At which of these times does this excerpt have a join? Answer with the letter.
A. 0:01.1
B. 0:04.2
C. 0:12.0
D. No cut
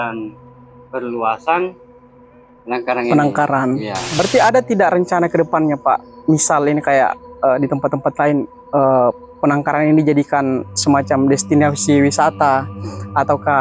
B